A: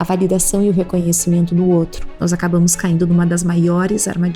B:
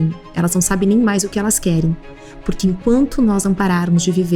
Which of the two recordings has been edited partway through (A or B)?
A